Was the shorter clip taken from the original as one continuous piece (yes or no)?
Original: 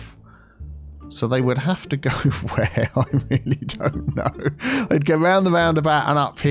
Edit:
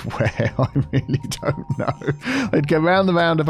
yes